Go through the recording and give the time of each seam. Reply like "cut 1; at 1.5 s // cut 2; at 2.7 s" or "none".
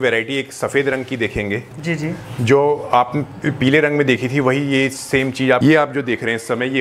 cut 1; at 5.6 s